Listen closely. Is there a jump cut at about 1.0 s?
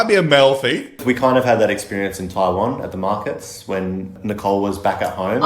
yes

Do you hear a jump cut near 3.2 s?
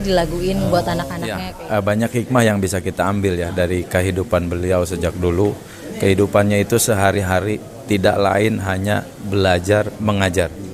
no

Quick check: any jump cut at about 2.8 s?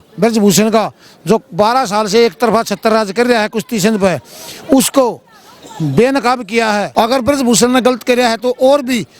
no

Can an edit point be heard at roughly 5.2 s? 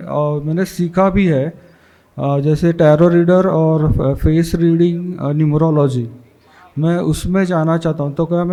no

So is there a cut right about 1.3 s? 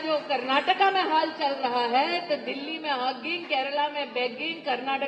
no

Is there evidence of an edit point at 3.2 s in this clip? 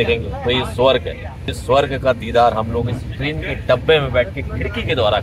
no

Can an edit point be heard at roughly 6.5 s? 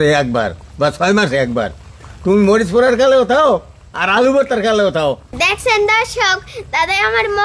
no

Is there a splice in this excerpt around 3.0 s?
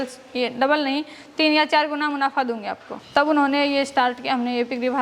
no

